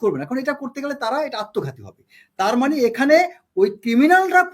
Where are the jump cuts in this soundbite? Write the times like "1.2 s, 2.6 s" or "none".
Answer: none